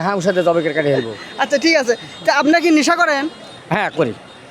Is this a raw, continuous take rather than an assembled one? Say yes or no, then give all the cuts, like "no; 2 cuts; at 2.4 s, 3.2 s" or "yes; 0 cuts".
yes; 0 cuts